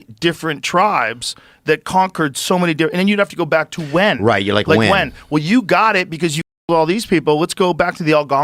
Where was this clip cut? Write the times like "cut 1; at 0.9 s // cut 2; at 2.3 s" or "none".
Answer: none